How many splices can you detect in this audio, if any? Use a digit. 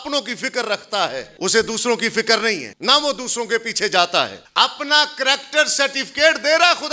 3